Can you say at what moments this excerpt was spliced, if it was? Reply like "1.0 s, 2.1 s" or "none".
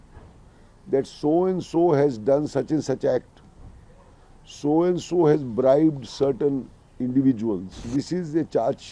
7.9 s